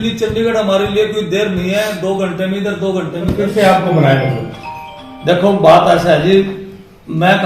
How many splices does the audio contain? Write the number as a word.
one